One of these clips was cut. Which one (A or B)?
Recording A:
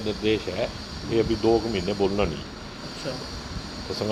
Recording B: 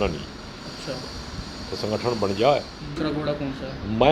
B